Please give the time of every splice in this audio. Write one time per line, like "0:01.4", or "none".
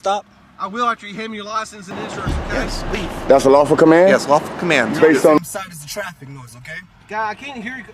0:02.0
0:05.4

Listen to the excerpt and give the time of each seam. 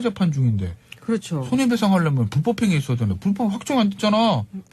none

